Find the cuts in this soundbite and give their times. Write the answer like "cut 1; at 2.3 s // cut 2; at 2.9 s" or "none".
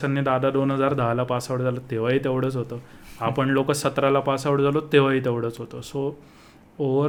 none